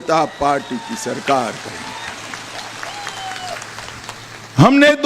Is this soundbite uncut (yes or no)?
yes